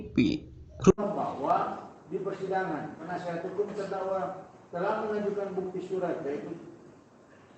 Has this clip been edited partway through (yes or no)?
yes